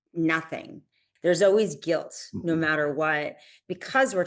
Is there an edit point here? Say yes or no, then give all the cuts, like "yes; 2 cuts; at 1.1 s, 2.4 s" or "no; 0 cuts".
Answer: yes; 1 cut; at 1.0 s